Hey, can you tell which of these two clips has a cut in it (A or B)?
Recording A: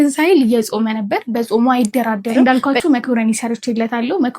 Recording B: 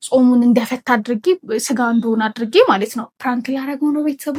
A